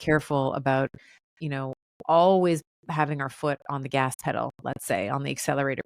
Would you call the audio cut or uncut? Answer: uncut